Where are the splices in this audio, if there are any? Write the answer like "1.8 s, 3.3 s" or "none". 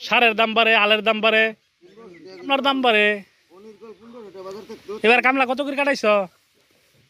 2.5 s